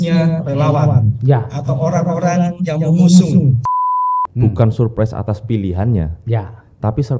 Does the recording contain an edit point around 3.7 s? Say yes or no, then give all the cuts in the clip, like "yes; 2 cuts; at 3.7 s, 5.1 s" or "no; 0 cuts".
yes; 1 cut; at 3.7 s